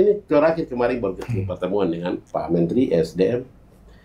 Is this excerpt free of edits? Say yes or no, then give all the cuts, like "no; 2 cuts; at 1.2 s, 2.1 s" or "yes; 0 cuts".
no; 1 cut; at 2.2 s